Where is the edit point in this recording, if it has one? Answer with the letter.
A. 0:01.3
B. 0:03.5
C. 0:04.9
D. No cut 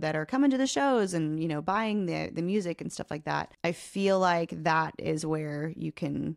B